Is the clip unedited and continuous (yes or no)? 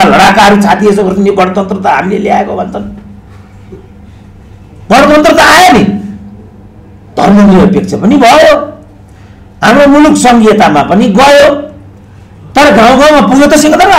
yes